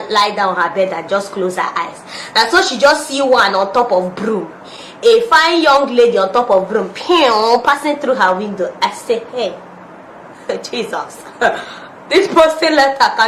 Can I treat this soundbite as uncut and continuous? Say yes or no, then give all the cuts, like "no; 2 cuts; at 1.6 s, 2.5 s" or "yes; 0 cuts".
yes; 0 cuts